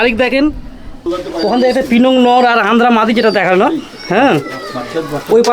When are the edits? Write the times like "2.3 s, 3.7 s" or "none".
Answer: 1.1 s